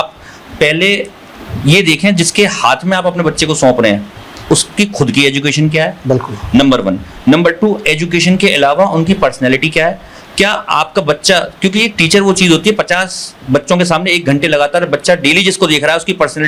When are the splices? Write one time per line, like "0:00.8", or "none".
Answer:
none